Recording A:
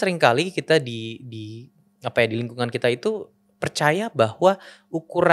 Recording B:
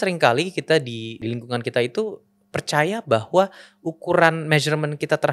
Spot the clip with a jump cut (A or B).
B